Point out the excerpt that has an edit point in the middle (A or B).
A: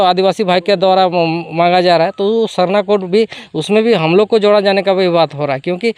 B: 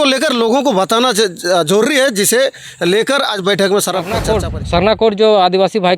B